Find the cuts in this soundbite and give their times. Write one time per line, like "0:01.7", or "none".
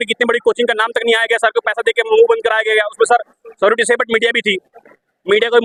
none